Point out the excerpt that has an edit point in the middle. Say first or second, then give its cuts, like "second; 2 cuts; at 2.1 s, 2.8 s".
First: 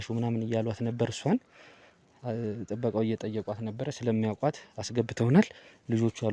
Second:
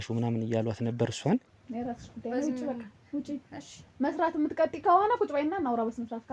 second; 1 cut; at 1.6 s